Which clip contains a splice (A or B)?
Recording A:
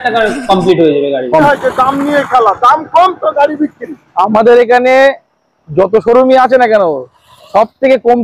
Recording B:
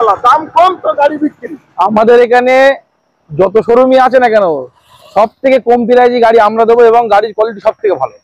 A